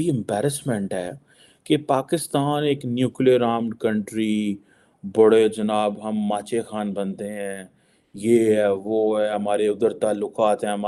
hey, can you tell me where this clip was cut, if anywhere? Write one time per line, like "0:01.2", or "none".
none

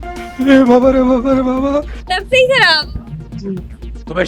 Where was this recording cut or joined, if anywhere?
none

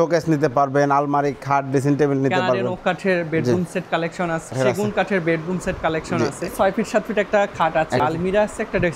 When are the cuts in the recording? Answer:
0:04.5
0:06.5
0:08.0

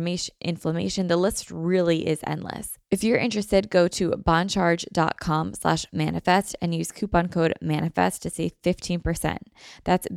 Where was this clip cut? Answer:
0:02.7

